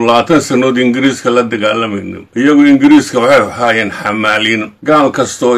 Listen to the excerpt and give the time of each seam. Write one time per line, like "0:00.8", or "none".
0:02.4
0:04.7